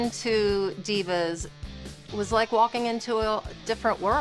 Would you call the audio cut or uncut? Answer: uncut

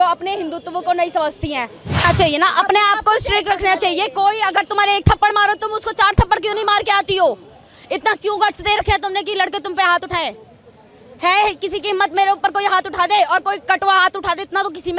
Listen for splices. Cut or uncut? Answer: cut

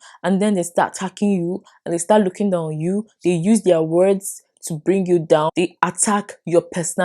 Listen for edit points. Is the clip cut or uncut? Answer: cut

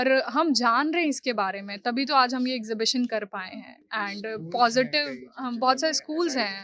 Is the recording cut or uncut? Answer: uncut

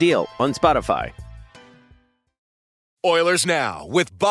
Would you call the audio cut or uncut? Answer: cut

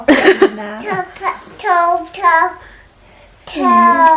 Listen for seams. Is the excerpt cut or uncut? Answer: uncut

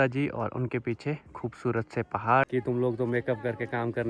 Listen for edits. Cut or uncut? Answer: cut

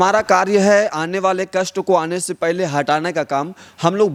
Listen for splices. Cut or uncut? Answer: uncut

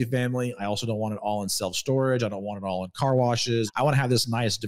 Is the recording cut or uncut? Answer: cut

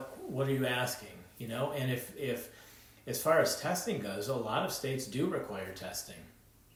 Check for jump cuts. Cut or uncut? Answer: uncut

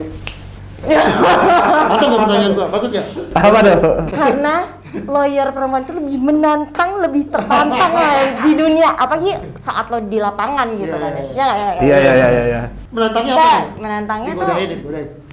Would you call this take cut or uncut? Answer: uncut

